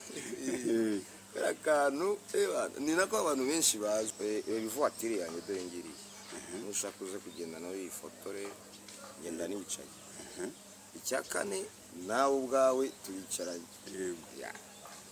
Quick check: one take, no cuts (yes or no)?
no